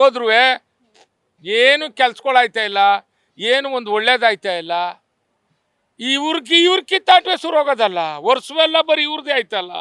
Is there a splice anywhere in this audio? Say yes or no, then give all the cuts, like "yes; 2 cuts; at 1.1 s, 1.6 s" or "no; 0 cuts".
no; 0 cuts